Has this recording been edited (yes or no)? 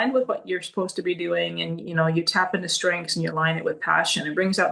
no